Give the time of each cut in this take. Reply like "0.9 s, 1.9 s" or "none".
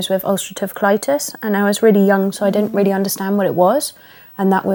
none